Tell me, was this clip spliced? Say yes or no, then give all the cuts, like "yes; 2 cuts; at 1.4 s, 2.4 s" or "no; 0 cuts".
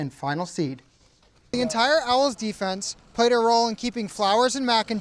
yes; 1 cut; at 1.5 s